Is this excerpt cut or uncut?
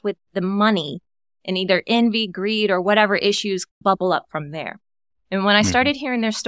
uncut